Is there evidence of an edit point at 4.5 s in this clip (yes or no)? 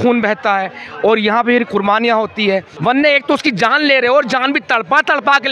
no